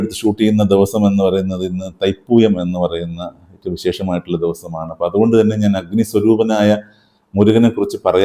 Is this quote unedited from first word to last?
yes; 0 cuts

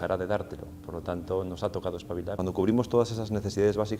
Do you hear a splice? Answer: yes; 1 cut; at 2.4 s

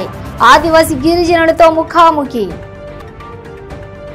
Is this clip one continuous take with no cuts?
yes; 0 cuts

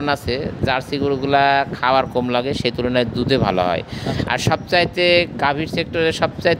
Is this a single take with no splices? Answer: yes; 0 cuts

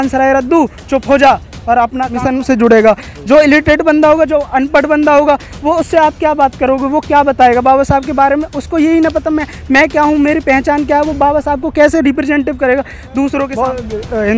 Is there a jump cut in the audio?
yes; 2 cuts; at 2.1 s, 13.5 s

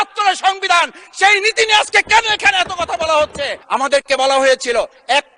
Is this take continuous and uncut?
no; 1 cut; at 3.6 s

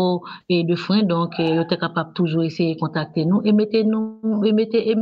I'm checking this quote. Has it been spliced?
no; 0 cuts

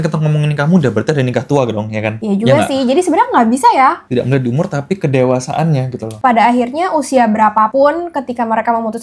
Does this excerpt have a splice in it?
yes; 3 cuts; at 4.0 s, 6.1 s, 7.7 s

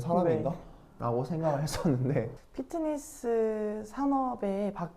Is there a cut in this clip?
yes; 1 cut; at 2.3 s

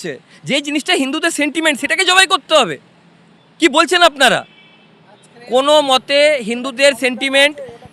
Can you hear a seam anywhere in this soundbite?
no; 0 cuts

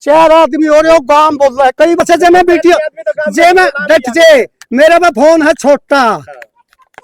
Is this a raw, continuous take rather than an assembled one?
no; 1 cut; at 2.0 s

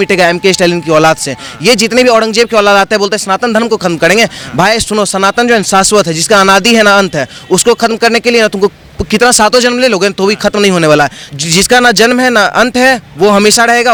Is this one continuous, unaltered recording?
yes; 0 cuts

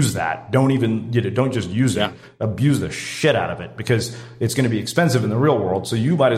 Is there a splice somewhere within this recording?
no; 0 cuts

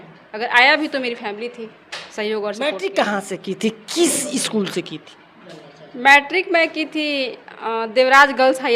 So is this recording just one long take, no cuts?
no; 1 cut; at 2.6 s

